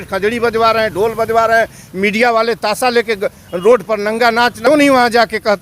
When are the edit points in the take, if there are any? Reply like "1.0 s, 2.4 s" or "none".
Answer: 4.6 s

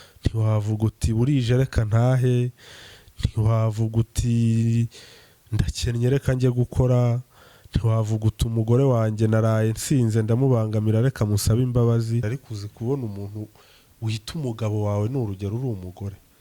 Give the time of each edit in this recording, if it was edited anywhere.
12.3 s

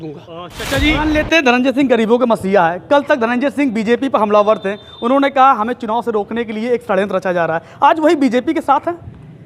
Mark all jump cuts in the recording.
0.9 s

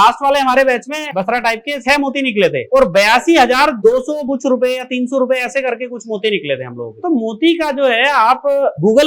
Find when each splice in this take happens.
1.1 s, 4.2 s

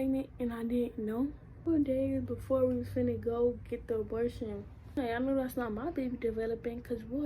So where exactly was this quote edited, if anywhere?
1.6 s, 5.0 s

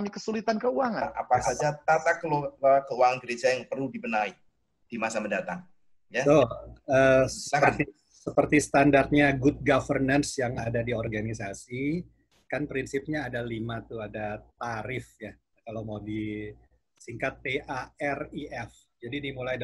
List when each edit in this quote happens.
1.1 s

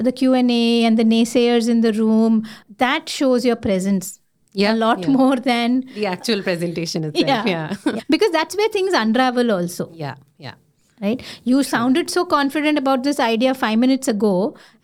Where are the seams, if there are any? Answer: 2.6 s, 8.0 s

